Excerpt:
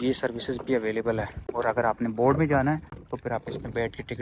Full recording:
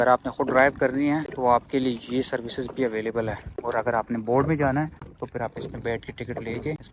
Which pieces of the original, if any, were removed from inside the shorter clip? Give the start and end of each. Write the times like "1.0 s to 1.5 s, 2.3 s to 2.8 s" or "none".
none